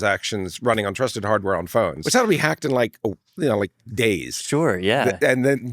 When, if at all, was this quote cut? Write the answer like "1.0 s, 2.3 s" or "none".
2.0 s